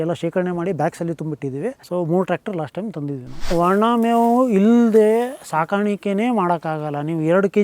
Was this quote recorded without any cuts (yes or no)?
no